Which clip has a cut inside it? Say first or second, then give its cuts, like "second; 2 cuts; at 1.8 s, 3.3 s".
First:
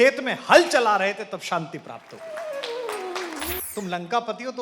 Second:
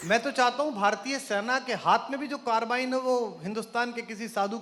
first; 1 cut; at 3.5 s